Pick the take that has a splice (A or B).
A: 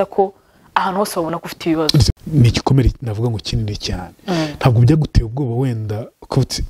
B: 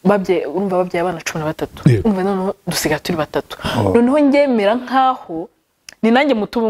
A